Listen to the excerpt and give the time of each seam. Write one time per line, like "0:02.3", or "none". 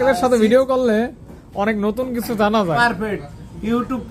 0:02.8